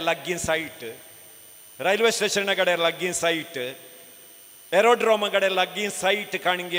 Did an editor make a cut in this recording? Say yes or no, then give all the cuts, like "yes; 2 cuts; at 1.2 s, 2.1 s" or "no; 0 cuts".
no; 0 cuts